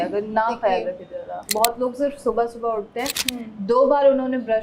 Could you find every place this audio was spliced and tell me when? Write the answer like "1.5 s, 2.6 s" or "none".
1.4 s